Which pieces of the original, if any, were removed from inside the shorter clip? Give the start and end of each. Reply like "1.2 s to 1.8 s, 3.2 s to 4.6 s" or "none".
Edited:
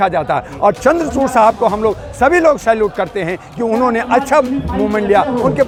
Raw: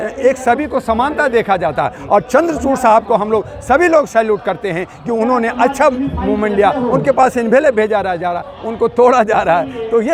none